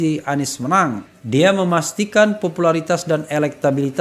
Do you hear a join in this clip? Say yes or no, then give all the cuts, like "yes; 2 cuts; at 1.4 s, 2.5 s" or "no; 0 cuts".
yes; 1 cut; at 1.1 s